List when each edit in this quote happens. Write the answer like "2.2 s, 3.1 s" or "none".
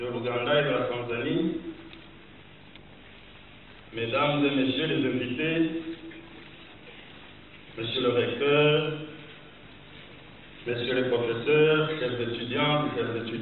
none